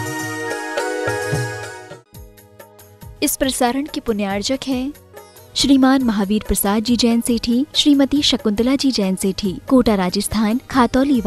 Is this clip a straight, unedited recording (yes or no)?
no